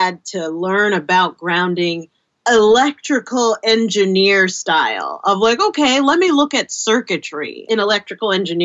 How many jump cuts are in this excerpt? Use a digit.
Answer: 2